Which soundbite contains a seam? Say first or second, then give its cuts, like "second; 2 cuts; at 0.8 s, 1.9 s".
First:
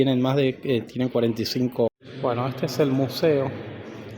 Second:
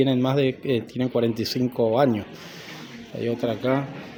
first; 1 cut; at 1.9 s